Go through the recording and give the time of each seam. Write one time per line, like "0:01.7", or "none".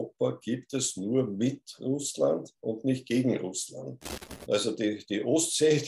0:04.2